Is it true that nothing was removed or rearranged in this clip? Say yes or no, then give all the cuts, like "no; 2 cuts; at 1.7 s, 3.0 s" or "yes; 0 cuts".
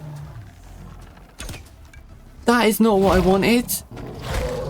no; 2 cuts; at 2.4 s, 3.8 s